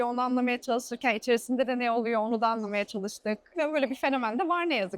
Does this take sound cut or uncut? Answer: cut